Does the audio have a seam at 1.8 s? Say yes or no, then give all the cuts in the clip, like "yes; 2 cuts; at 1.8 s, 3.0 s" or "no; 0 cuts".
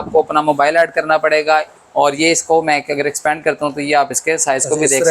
yes; 1 cut; at 1.8 s